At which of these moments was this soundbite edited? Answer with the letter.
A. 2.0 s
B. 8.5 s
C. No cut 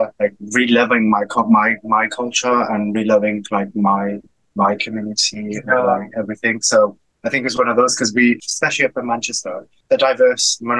B